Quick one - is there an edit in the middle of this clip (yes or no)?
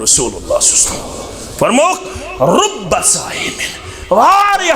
yes